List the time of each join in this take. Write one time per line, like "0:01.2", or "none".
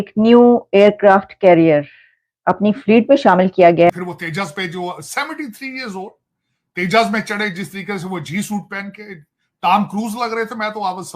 0:03.9